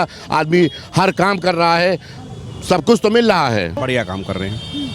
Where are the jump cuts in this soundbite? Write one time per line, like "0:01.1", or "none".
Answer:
0:03.7